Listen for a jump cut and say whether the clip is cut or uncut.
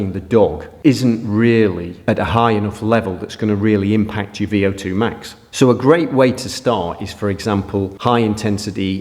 uncut